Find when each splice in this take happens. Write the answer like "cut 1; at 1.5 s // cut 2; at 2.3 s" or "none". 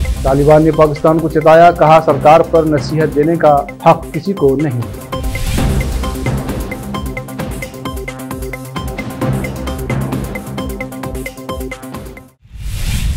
cut 1; at 12.2 s